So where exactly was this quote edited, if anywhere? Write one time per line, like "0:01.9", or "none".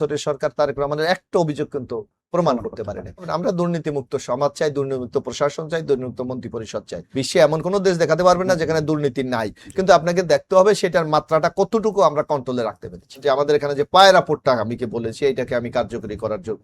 0:03.3
0:07.0
0:13.2